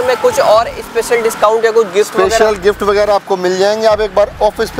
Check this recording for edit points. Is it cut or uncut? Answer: uncut